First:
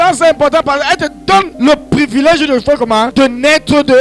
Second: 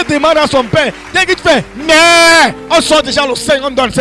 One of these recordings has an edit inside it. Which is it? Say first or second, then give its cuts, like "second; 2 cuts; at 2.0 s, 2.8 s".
first; 2 cuts; at 1.5 s, 3.1 s